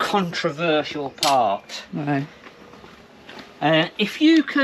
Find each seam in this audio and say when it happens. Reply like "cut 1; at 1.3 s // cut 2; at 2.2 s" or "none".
none